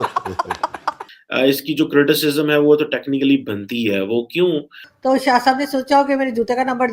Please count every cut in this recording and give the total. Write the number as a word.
two